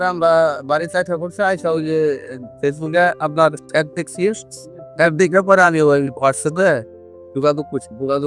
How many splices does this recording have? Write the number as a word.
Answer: zero